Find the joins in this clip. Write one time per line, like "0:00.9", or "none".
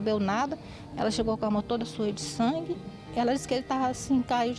0:03.0